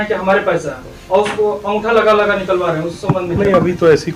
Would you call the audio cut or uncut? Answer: uncut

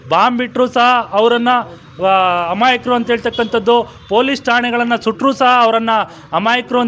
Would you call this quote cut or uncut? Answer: uncut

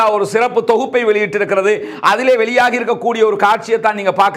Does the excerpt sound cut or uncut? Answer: uncut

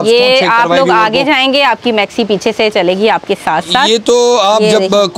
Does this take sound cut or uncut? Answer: uncut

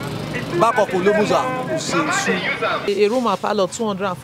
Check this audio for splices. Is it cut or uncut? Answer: cut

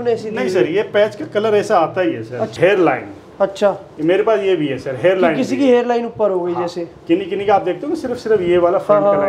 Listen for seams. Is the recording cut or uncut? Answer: cut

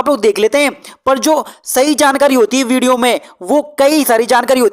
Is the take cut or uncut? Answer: uncut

